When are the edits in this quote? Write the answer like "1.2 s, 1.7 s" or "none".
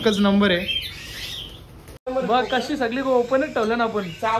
2.1 s